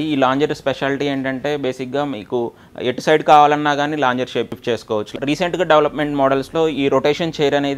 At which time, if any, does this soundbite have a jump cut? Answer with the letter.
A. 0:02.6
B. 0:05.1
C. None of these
B